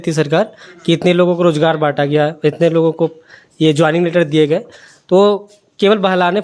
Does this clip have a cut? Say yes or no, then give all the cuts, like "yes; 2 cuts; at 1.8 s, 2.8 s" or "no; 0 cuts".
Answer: no; 0 cuts